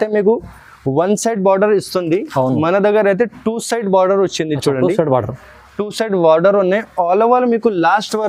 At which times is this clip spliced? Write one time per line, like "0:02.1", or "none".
none